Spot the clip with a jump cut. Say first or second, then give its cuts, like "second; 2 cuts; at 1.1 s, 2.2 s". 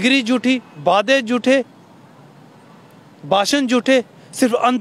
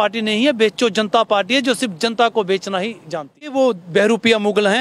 second; 1 cut; at 3.5 s